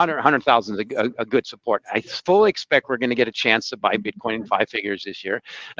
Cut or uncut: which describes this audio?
uncut